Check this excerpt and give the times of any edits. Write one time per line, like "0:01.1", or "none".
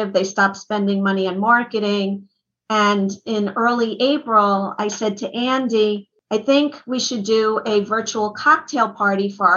0:06.1